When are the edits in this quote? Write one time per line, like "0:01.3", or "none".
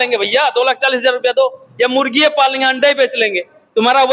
none